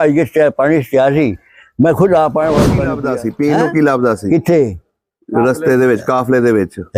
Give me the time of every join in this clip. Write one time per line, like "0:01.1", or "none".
0:02.9